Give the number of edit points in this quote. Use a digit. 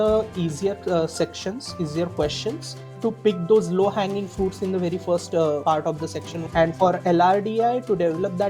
2